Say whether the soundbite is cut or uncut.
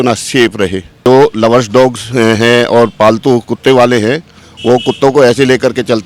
cut